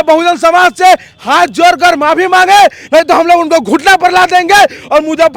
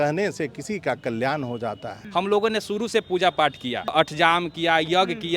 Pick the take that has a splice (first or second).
second